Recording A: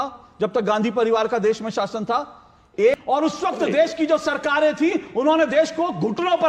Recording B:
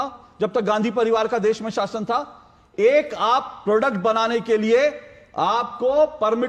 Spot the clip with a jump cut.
A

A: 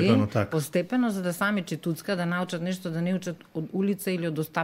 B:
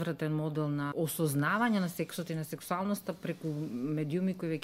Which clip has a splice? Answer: B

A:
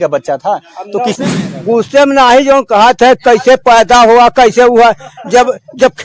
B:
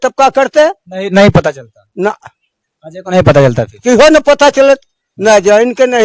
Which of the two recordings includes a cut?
A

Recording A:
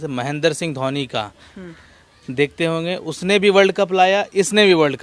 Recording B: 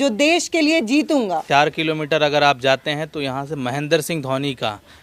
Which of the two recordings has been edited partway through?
B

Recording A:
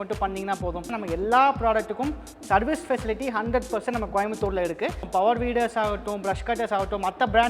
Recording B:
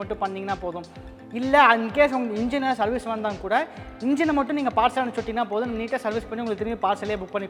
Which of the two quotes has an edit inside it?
A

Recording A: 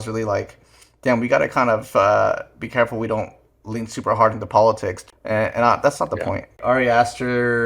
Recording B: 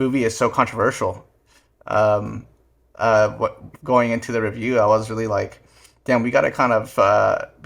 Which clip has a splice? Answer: A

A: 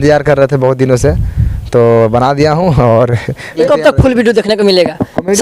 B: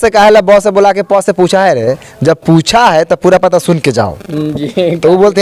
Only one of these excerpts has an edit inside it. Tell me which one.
A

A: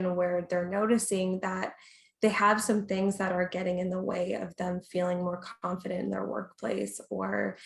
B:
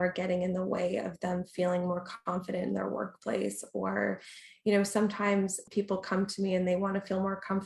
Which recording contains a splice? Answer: B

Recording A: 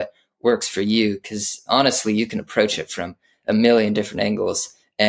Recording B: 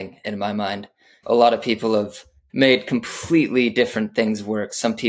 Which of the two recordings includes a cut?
B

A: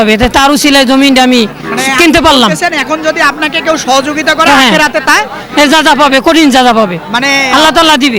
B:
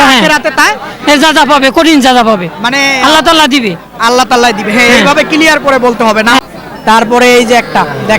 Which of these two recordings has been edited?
B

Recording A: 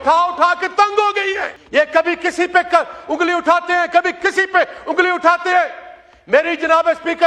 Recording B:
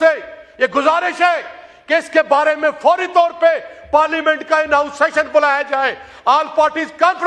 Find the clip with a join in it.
A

